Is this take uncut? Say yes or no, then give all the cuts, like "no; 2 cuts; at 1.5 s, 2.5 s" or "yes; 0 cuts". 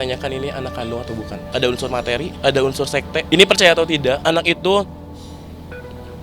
no; 4 cuts; at 1.4 s, 2.3 s, 3.3 s, 4.2 s